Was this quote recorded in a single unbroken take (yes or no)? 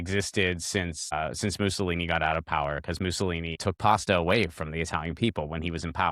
no